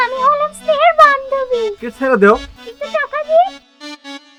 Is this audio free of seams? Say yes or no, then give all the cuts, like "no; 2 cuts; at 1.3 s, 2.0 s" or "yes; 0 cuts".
yes; 0 cuts